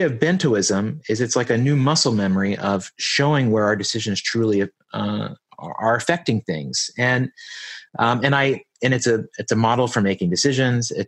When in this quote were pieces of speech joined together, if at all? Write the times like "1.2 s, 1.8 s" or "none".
none